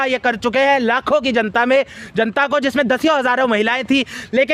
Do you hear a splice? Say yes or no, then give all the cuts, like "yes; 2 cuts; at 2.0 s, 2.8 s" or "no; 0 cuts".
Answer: no; 0 cuts